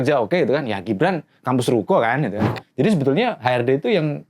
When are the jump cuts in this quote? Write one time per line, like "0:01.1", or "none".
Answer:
0:02.5